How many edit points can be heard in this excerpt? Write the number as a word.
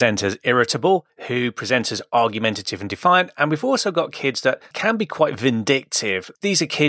one